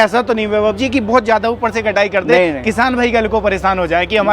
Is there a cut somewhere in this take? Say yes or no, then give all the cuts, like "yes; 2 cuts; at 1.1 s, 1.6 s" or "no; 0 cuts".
no; 0 cuts